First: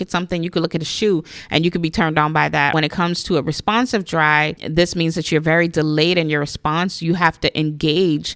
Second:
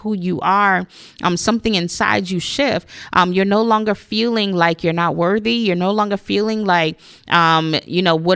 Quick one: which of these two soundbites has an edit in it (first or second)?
first